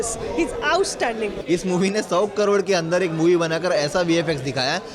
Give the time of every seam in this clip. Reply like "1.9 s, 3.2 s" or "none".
1.4 s